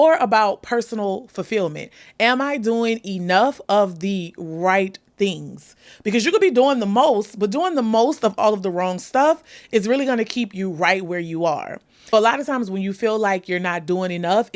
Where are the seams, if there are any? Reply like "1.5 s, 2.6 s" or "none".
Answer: 12.1 s